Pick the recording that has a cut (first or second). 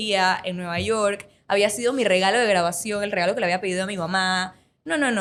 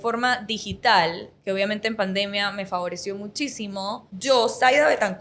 second